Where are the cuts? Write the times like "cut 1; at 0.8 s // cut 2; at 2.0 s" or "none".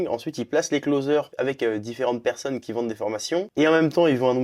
cut 1; at 1.3 s // cut 2; at 3.5 s